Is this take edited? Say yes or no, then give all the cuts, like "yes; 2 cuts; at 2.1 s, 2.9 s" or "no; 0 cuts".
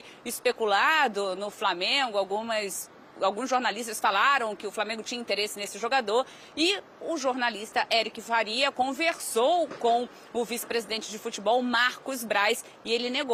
no; 0 cuts